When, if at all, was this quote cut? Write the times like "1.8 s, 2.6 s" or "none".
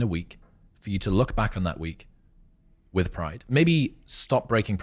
3.3 s

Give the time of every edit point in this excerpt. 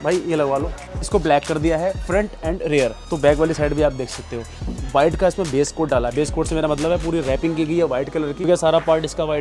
1.0 s, 3.0 s, 4.7 s, 8.5 s

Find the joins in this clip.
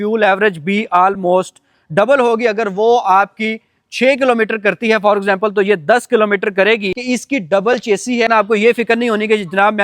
6.9 s, 8.5 s

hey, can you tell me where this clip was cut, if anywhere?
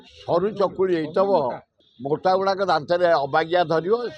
none

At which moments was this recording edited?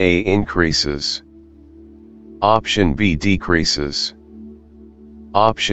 1.1 s, 2.4 s

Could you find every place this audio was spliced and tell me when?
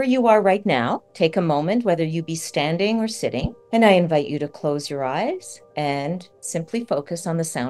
1.0 s, 3.6 s, 5.6 s, 6.3 s

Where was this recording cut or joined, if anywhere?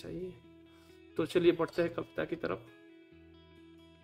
none

